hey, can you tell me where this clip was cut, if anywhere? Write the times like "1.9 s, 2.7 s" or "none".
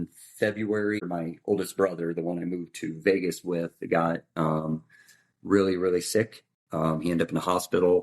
1.1 s